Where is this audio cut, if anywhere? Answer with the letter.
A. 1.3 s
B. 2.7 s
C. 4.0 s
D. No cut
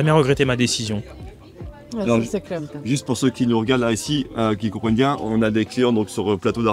D